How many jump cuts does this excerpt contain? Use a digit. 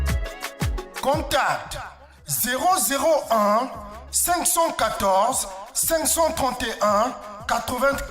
1